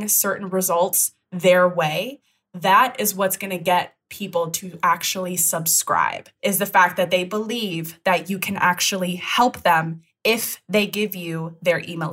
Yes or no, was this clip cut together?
yes